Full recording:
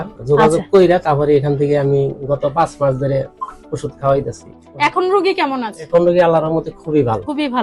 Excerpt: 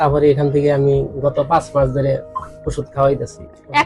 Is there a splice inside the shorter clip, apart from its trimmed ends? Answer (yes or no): no